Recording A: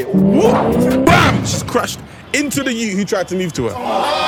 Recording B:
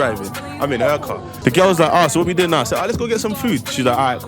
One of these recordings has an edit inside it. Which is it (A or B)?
B